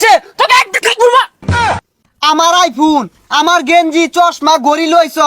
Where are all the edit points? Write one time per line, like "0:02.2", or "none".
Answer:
0:01.7